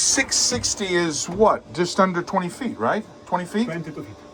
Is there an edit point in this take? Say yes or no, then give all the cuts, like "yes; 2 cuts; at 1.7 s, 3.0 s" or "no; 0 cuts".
no; 0 cuts